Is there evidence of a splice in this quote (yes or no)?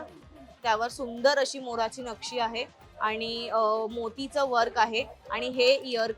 no